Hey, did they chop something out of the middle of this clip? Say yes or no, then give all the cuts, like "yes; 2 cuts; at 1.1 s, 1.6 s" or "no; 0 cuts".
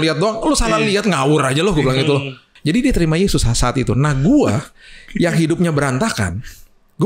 yes; 1 cut; at 2.5 s